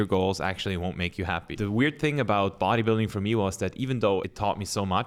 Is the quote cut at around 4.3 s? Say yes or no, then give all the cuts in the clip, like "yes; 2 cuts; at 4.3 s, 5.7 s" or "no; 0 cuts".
yes; 2 cuts; at 1.5 s, 4.3 s